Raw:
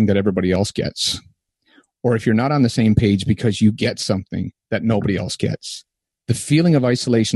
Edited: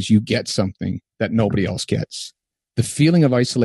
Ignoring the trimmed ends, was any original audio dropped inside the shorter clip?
no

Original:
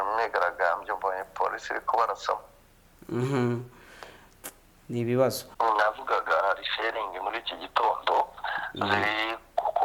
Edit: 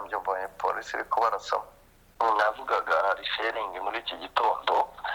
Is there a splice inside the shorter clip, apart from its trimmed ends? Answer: yes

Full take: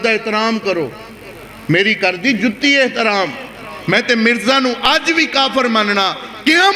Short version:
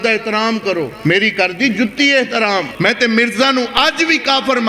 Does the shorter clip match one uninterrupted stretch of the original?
no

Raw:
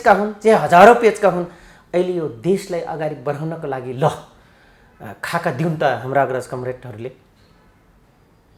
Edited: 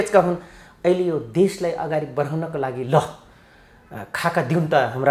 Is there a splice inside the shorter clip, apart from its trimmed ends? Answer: no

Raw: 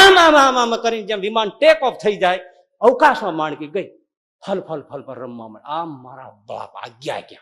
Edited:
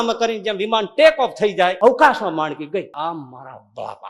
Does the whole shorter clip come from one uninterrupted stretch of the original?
no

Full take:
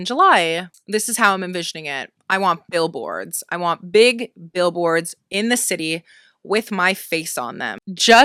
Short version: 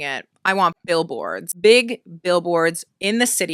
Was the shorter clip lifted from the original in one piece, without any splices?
no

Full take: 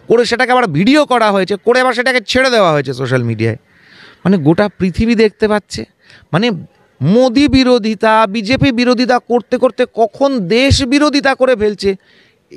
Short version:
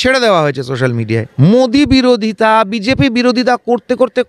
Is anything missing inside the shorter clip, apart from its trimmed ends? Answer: yes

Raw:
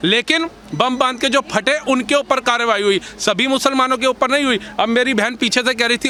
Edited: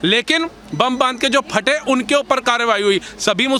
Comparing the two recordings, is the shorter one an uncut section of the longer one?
yes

